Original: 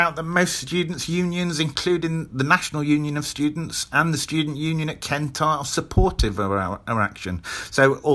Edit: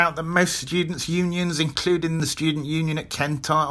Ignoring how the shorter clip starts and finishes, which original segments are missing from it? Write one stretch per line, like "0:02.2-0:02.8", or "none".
0:02.3-0:04.2